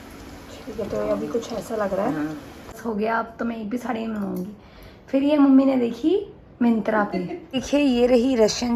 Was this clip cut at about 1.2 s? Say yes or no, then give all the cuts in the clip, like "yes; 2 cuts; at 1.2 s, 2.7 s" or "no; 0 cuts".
no; 2 cuts; at 2.8 s, 7.6 s